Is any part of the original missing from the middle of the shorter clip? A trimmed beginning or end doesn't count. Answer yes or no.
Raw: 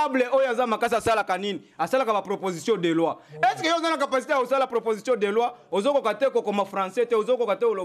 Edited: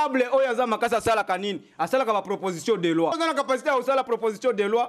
yes